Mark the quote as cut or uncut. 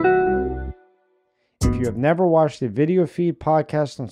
cut